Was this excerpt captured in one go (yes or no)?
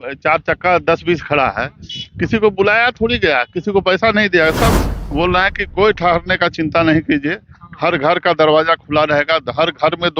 no